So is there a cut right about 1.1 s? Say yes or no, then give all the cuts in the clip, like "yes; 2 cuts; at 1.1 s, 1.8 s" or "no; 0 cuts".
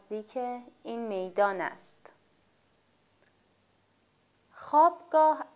no; 1 cut; at 2.5 s